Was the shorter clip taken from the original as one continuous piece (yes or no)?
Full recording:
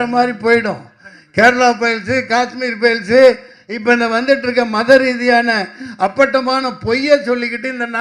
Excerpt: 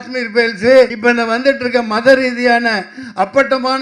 no